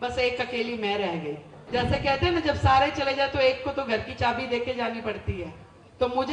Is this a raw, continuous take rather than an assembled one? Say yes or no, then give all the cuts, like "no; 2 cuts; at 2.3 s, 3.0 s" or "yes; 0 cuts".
no; 1 cut; at 1.5 s